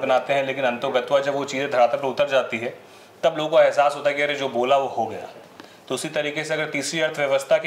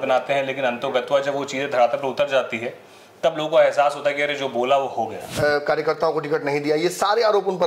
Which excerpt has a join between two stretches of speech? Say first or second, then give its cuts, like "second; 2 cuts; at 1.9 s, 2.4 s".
second; 1 cut; at 5.2 s